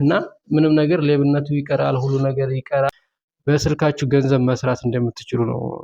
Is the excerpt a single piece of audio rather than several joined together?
no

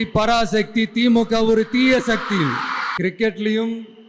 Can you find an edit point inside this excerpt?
yes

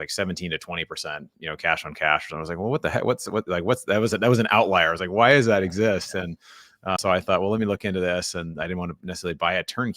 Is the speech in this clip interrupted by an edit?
yes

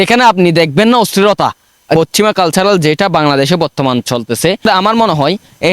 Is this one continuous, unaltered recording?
no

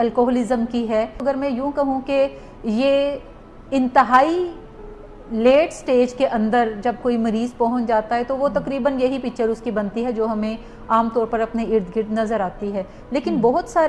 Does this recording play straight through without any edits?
no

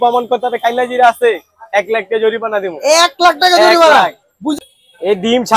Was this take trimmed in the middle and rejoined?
yes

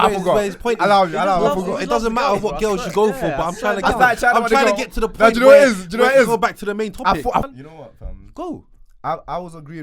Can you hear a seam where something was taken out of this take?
yes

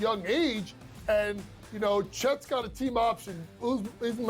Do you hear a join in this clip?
no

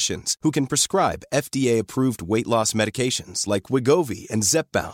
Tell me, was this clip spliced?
no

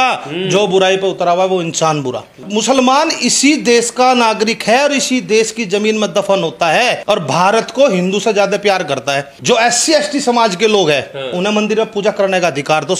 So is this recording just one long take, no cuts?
no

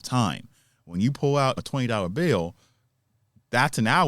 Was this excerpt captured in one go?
no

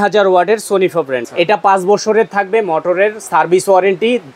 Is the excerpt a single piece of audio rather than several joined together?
no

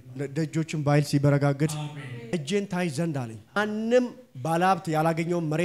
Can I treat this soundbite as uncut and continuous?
no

